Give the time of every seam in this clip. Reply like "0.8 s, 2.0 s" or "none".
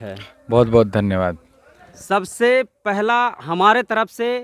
none